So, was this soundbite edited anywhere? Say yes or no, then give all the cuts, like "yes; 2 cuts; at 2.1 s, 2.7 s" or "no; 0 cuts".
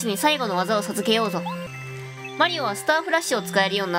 yes; 1 cut; at 1.7 s